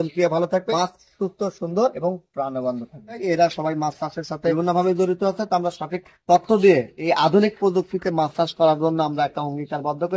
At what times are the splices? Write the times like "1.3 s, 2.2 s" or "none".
0.7 s, 2.0 s, 3.2 s